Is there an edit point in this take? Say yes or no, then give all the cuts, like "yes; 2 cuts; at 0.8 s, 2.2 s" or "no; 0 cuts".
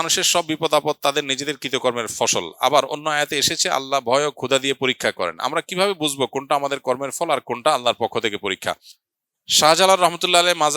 yes; 1 cut; at 9.1 s